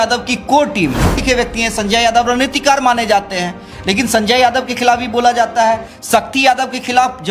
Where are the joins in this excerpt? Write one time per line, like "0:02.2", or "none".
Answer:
0:01.2